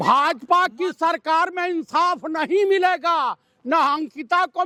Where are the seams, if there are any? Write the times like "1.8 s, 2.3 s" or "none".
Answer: none